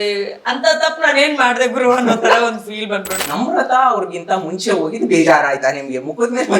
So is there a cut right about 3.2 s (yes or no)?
yes